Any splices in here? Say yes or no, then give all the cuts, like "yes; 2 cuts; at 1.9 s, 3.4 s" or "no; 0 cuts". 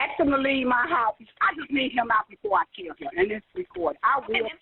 yes; 1 cut; at 1.2 s